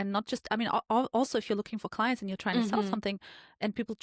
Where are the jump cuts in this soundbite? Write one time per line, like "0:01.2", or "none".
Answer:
none